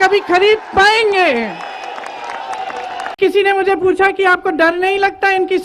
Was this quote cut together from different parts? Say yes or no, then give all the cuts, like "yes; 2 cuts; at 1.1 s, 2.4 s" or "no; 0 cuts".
yes; 1 cut; at 3.2 s